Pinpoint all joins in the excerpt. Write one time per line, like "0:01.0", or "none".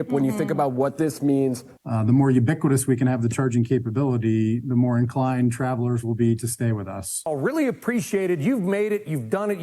0:01.7
0:07.3

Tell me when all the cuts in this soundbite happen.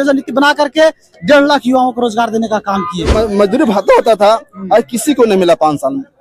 0:03.1

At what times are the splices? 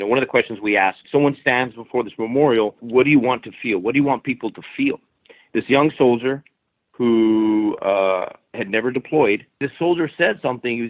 0:01.0
0:02.8
0:05.3
0:09.7

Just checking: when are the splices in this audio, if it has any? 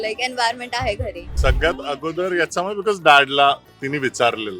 0:01.3

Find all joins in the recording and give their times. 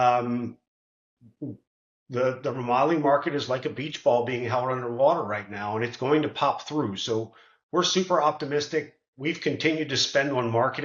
none

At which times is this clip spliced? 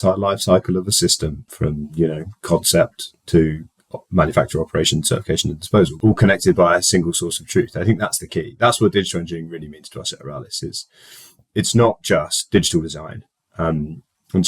0:01.5
0:05.9

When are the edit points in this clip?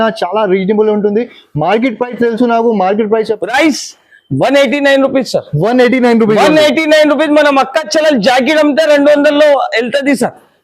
0:03.4

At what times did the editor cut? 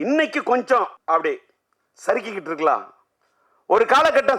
0:01.0

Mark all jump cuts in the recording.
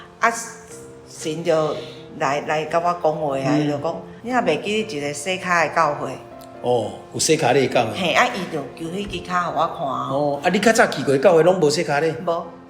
0:04.1

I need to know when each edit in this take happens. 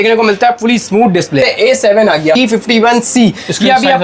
0:01.5
0:02.4

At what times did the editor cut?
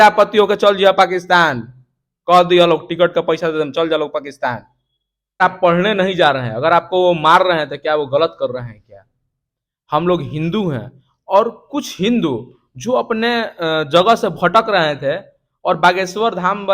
0:05.4

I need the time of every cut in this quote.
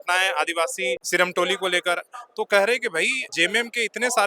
0:01.0
0:03.2

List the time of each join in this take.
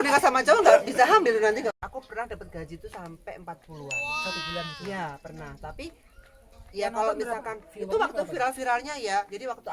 0:01.7

